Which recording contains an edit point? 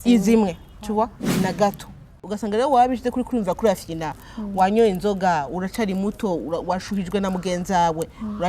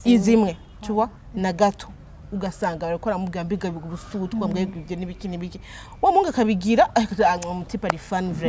first; 1 cut; at 2.2 s

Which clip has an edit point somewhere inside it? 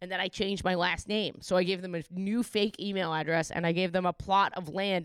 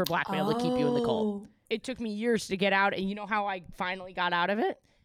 second; 1 cut; at 1.6 s

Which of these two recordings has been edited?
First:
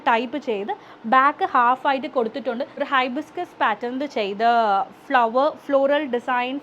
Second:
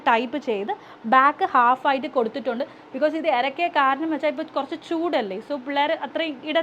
first; 1 cut; at 2.7 s

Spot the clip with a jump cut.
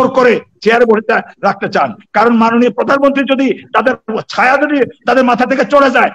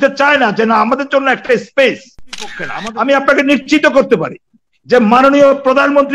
second; 1 cut; at 2.7 s

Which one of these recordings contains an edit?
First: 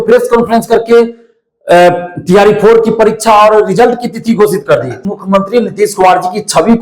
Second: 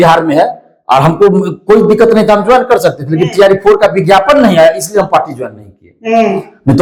first; 1 cut; at 5.0 s

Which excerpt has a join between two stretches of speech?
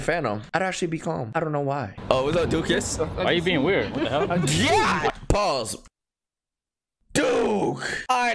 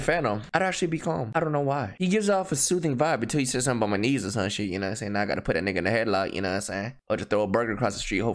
first; 2 cuts; at 1.9 s, 6.5 s

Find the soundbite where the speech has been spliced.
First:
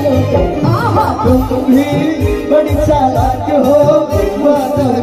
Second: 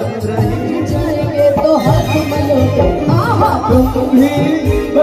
second; 1 cut; at 1.1 s

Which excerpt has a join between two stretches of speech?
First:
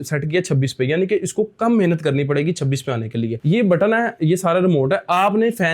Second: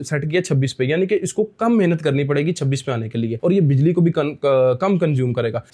first; 1 cut; at 3.4 s

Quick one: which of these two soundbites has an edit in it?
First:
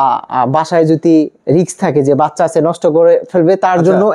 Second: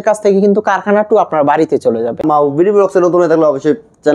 second; 1 cut; at 2.2 s

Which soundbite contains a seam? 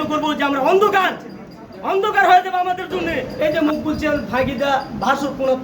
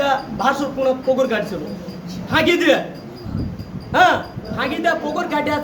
first; 1 cut; at 3.2 s

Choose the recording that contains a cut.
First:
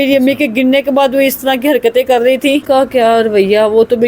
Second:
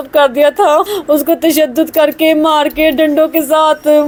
first; 1 cut; at 2.6 s

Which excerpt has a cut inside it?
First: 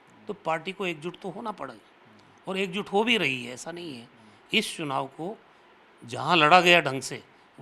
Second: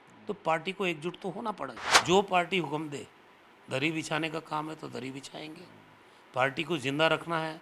second; 1 cut; at 1.9 s

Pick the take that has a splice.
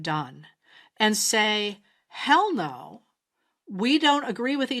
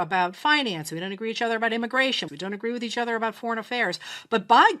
second; 1 cut; at 2.3 s

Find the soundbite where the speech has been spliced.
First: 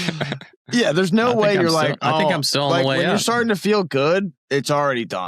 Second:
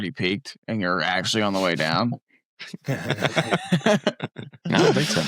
first; 1 cut; at 4.4 s

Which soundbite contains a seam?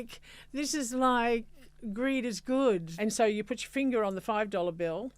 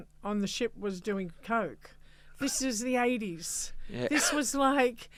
first; 1 cut; at 2.9 s

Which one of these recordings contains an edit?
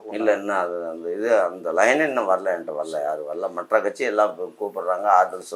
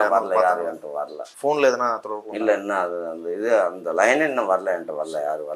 second; 1 cut; at 1.2 s

